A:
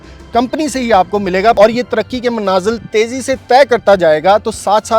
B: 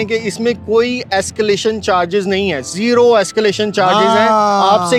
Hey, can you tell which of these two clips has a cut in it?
A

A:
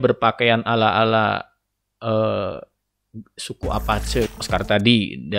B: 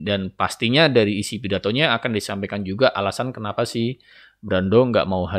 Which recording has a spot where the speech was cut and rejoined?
A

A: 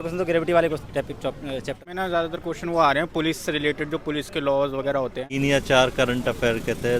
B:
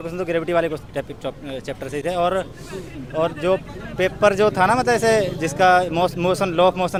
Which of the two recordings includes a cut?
A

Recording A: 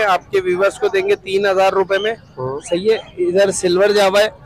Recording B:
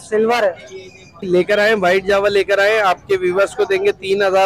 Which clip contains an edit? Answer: B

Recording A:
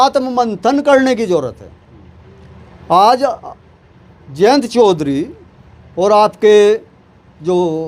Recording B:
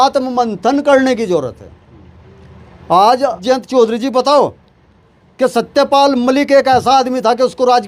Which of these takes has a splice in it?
B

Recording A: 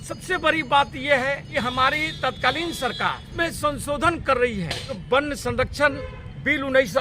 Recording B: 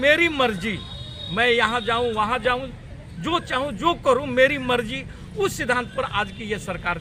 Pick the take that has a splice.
A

